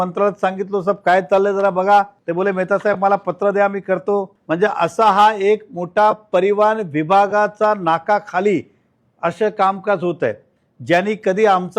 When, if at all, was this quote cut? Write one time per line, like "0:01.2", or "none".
0:02.2
0:04.4